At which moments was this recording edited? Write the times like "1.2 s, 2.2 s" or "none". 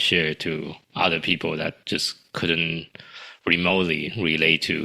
none